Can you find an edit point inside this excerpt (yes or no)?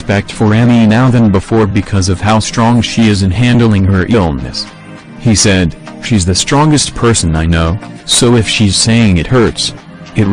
yes